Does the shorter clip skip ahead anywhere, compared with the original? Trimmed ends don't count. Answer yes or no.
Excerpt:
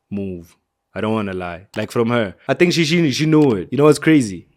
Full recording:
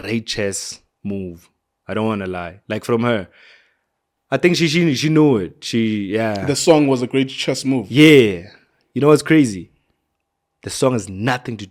yes